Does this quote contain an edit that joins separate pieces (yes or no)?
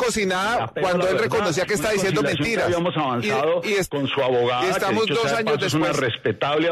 no